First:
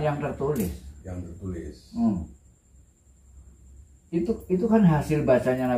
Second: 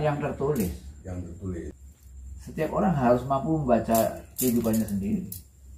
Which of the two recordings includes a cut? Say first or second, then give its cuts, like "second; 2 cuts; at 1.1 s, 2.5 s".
second; 1 cut; at 1.8 s